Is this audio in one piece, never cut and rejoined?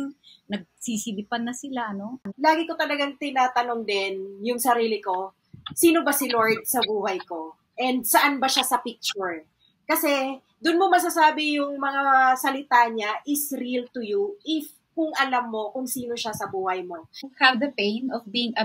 no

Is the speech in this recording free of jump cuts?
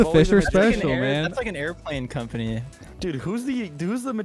yes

